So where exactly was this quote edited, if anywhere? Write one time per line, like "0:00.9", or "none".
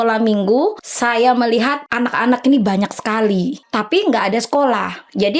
0:00.9
0:01.8
0:03.6